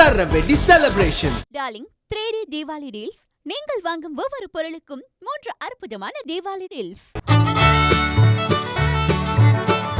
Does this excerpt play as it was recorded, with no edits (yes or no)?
yes